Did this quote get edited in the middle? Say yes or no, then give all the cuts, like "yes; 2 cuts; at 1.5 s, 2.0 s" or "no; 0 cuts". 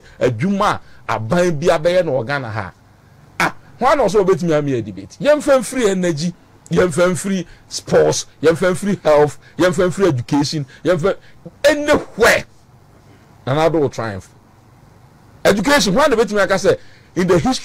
no; 0 cuts